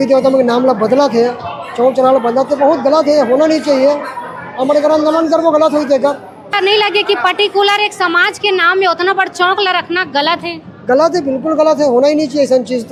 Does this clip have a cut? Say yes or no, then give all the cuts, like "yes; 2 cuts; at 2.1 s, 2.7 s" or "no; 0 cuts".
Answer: no; 0 cuts